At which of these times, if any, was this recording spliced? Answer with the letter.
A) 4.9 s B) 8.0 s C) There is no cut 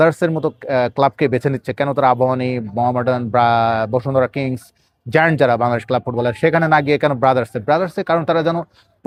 C